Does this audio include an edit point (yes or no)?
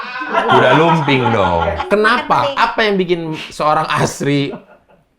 yes